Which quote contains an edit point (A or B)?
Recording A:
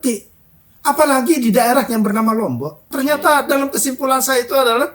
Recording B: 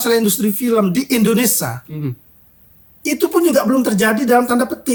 A